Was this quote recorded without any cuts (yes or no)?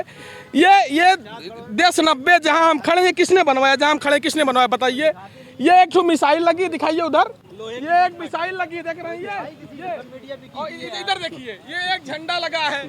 yes